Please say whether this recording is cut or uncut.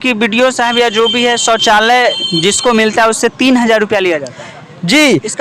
uncut